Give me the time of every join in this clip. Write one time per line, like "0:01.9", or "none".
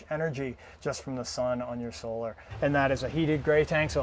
0:02.5